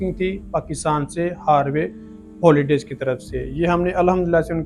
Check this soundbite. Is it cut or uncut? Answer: uncut